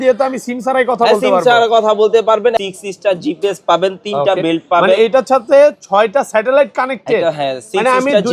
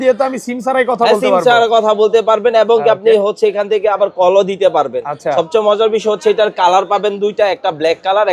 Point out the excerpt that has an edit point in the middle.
first; 1 cut; at 2.5 s

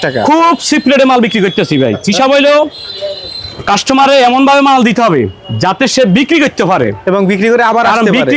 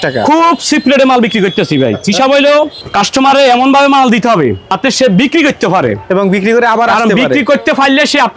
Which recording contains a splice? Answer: second; 2 cuts; at 2.8 s, 4.7 s

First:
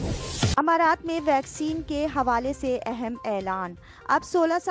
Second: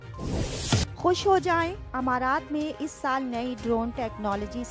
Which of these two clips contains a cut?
second; 1 cut; at 0.9 s

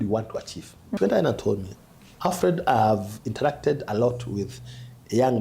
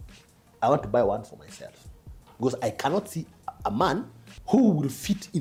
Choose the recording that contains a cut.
first; 1 cut; at 1.0 s

